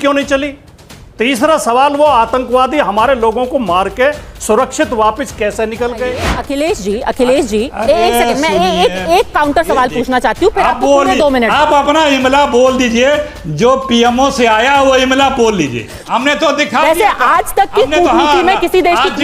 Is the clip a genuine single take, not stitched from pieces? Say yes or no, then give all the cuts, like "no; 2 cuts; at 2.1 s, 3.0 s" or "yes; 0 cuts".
no; 2 cuts; at 6.4 s, 15.9 s